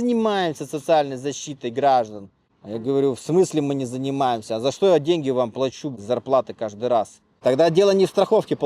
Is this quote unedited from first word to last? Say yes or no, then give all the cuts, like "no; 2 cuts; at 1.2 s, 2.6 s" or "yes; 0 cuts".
no; 1 cut; at 7.2 s